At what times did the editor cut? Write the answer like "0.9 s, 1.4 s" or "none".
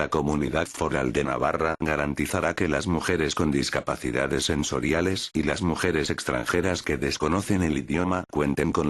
1.2 s, 2.7 s